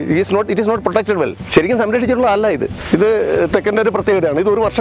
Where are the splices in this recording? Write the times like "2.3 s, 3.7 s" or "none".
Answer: 1.4 s, 2.8 s